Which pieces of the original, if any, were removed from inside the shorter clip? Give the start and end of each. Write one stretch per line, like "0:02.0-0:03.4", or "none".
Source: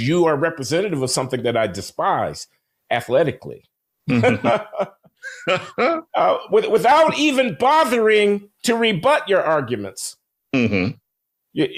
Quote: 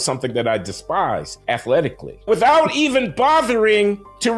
0:02.4-0:02.7
0:03.7-0:06.7